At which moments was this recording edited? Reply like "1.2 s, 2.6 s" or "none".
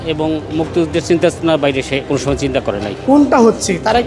2.4 s